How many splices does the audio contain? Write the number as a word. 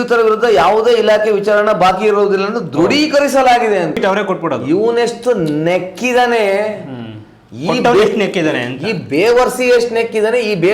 one